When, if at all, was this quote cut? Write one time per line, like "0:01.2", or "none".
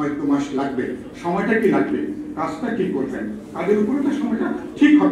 none